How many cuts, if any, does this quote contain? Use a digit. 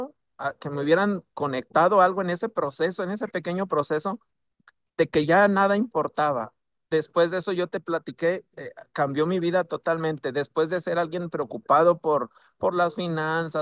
0